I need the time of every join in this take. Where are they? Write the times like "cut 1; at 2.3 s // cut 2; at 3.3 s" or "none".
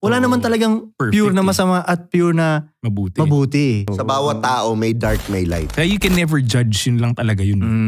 cut 1; at 3.9 s // cut 2; at 5.7 s